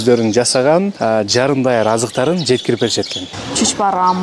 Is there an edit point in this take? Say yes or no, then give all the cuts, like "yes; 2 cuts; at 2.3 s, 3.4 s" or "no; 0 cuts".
yes; 2 cuts; at 0.9 s, 3.3 s